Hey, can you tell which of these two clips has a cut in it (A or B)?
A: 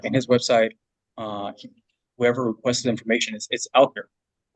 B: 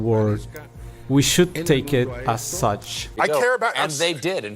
B